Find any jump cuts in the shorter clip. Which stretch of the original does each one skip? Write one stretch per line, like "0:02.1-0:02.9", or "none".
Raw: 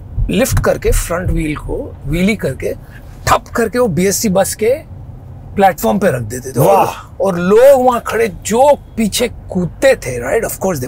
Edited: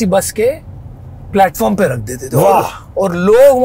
none